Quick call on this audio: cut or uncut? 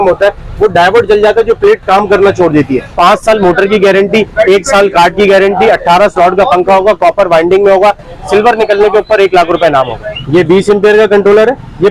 cut